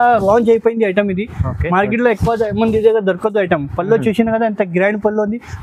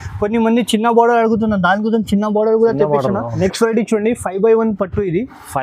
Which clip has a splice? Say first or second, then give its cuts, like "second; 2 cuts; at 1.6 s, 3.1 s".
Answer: second; 1 cut; at 3.3 s